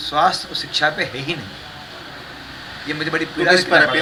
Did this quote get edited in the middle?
no; 0 cuts

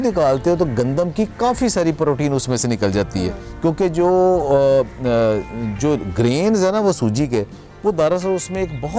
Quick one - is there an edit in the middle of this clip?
no; 0 cuts

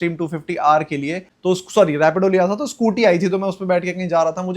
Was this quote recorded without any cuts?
no; 1 cut; at 1.3 s

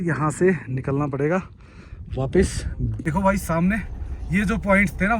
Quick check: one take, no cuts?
no; 1 cut; at 2.9 s

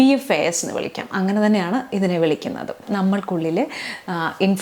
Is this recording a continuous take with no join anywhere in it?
no; 1 cut; at 2.9 s

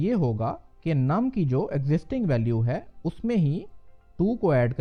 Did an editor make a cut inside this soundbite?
no; 0 cuts

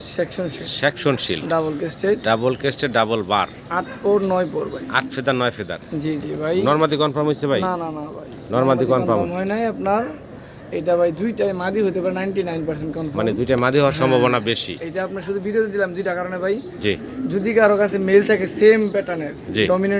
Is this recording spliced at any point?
no; 0 cuts

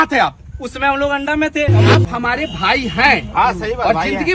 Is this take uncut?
no; 1 cut; at 1.8 s

